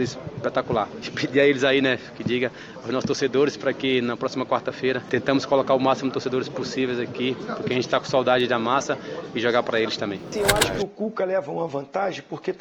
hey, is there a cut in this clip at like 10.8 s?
yes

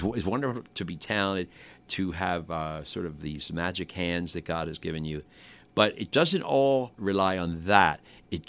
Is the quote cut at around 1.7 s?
no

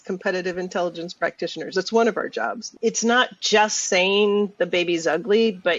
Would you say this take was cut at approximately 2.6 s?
yes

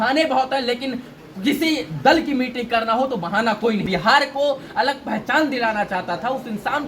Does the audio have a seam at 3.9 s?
yes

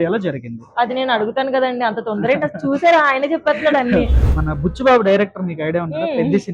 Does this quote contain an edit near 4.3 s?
yes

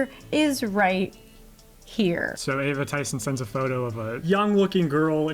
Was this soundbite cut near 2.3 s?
yes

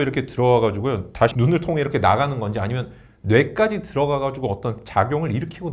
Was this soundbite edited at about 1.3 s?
yes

